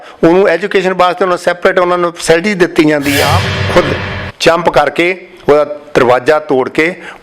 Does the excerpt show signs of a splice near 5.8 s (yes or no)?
no